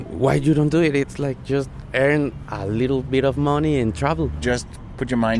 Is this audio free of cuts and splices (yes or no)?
no